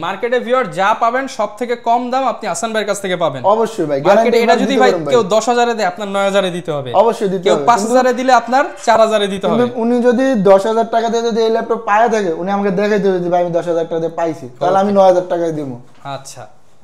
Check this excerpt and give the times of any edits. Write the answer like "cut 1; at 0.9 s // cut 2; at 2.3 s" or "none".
none